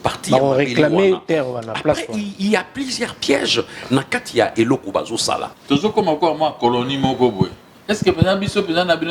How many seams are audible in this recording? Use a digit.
2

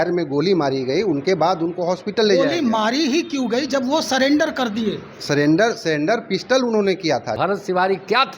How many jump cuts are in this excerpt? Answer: 1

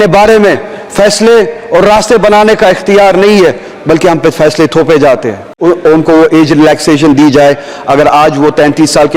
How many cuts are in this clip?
1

